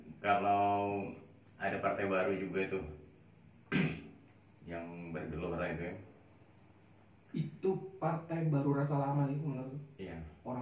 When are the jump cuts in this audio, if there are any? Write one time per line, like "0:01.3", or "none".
none